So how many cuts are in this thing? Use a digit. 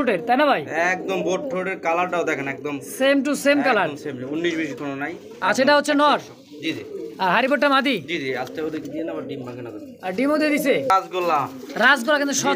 1